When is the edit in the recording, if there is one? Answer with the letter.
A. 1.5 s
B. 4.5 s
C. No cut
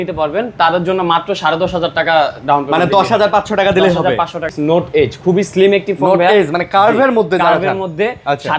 B